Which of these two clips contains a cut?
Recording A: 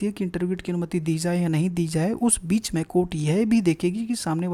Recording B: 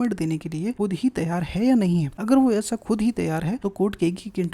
B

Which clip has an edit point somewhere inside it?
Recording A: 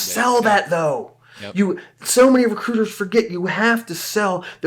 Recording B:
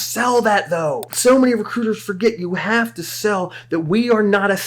B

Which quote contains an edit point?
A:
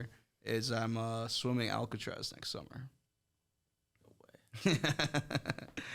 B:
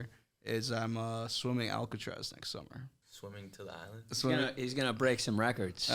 B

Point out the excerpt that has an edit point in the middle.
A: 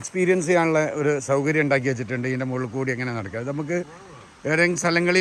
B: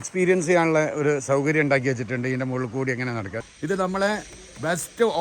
B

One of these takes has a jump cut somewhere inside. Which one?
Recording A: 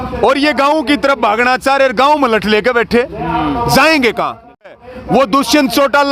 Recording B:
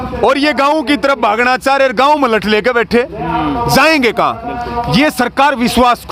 A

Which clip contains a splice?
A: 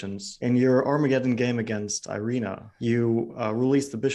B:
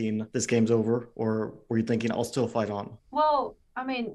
A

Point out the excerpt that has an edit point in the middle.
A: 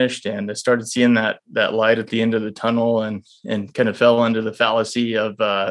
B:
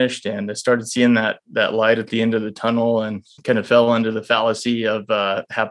B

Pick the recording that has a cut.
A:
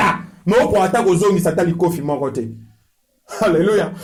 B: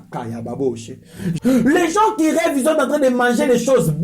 B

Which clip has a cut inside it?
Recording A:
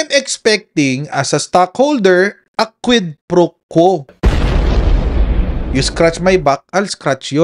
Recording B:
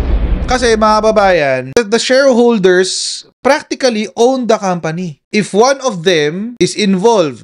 B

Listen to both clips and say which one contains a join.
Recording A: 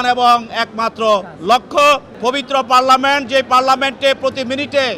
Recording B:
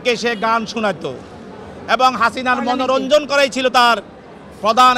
A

